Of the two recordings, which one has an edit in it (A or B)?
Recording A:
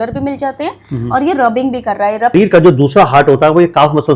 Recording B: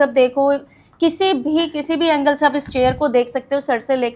A